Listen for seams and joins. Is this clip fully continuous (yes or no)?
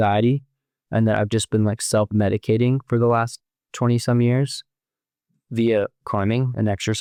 yes